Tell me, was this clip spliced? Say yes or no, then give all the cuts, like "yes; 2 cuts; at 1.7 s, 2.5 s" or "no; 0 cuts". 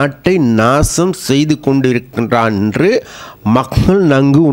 no; 0 cuts